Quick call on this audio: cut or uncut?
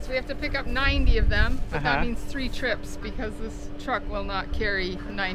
uncut